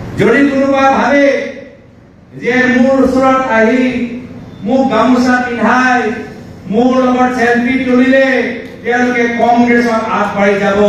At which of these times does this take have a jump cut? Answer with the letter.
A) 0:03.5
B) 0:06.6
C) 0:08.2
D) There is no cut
D